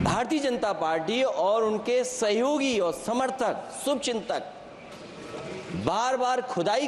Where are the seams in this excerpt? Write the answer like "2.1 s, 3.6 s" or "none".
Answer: none

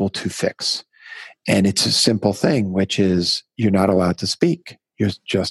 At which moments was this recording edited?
none

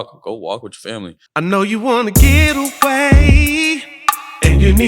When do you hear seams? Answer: 1.2 s

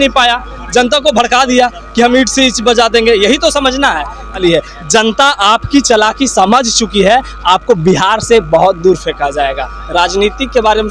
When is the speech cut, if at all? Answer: 4.4 s

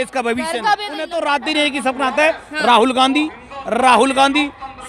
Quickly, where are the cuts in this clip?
1.0 s

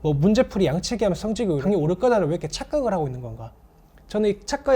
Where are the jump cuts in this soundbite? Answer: 1.6 s

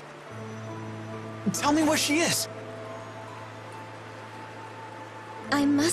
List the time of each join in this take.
3.8 s

